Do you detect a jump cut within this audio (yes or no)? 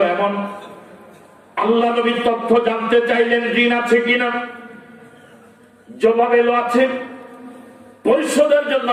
no